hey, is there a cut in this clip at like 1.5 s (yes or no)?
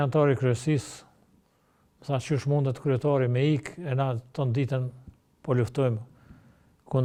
no